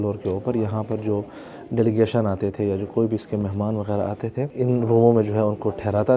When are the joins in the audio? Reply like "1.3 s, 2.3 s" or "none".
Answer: 4.5 s